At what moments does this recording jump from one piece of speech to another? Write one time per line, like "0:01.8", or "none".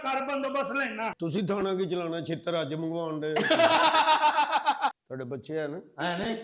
0:04.8